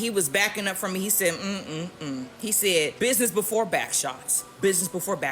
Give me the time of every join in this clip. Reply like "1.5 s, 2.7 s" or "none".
2.9 s